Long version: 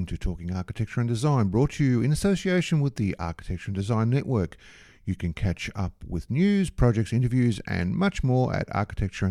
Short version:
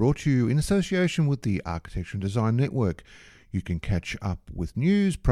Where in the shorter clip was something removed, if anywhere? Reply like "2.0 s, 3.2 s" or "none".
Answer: none